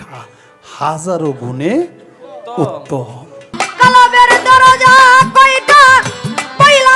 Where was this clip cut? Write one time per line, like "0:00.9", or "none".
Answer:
0:03.4